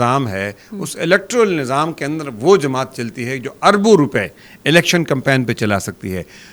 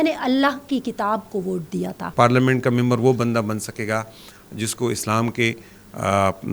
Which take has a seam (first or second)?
second